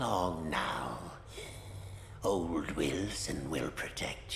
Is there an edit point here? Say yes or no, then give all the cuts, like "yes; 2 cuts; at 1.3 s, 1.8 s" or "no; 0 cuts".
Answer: no; 0 cuts